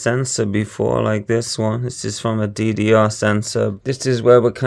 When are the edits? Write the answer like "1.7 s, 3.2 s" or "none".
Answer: 3.7 s